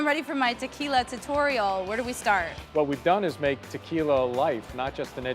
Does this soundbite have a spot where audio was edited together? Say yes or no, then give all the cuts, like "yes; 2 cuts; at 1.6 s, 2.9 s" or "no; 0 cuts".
yes; 1 cut; at 2.6 s